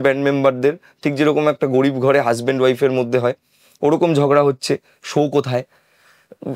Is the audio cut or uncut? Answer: uncut